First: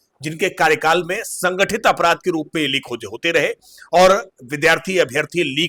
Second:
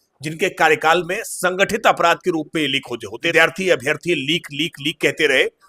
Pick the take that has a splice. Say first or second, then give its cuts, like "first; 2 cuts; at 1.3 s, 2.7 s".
second; 1 cut; at 3.1 s